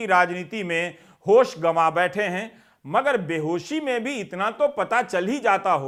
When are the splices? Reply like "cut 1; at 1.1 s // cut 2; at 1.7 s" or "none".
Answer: none